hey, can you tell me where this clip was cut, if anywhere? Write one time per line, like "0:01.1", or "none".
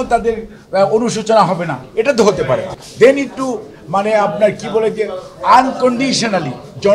0:02.8